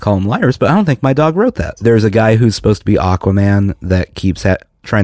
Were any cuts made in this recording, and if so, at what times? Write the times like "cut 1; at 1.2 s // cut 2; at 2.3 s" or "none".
cut 1; at 1.7 s

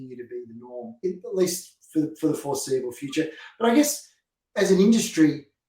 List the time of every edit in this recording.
cut 1; at 1.0 s

